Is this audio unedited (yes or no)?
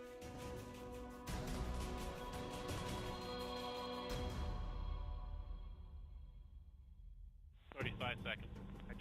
yes